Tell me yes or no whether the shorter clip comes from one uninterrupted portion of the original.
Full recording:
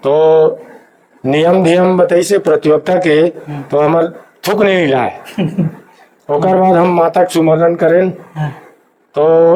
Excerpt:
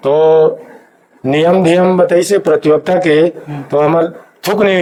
yes